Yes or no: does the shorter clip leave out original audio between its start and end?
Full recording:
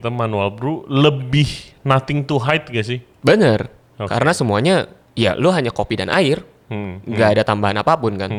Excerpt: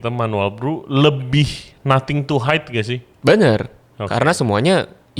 no